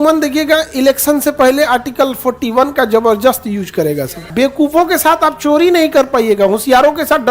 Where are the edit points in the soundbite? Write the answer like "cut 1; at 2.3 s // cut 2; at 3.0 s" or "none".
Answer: cut 1; at 4.3 s